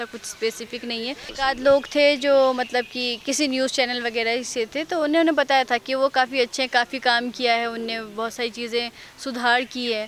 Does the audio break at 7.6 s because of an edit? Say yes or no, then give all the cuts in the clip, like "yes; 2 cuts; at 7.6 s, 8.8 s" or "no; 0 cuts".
no; 1 cut; at 1.3 s